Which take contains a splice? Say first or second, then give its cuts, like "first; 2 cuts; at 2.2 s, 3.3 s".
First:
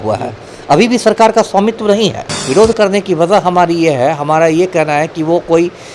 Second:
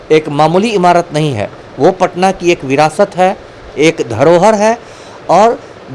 first; 1 cut; at 2.3 s